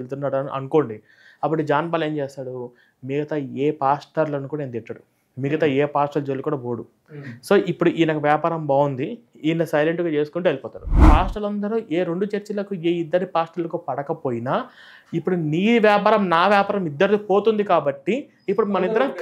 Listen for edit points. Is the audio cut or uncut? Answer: cut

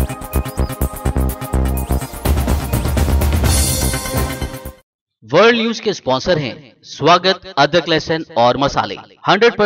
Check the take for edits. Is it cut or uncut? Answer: cut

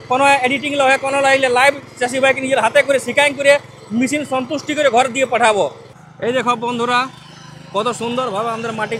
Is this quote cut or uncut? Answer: cut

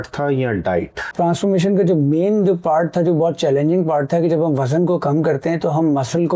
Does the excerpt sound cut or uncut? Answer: cut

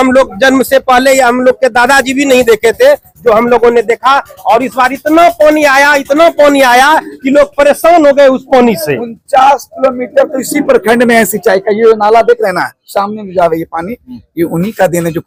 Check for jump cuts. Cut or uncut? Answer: uncut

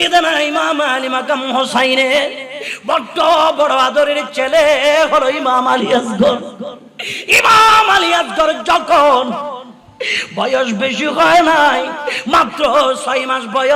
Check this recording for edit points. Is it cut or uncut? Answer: uncut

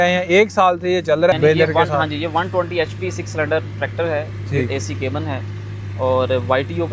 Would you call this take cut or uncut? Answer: cut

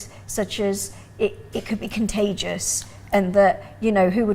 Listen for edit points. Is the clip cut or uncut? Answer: uncut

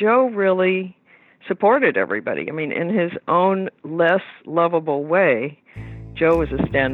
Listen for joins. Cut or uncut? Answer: uncut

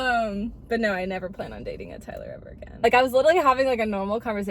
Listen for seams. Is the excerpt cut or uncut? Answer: cut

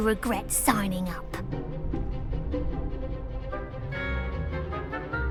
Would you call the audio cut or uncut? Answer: uncut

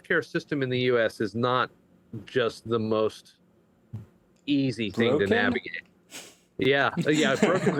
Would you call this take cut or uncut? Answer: uncut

